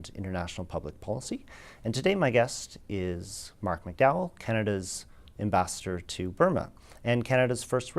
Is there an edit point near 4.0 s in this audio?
yes; 1 cut; at 4.0 s

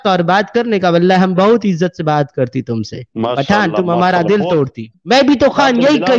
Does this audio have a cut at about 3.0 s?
no; 1 cut; at 4.9 s

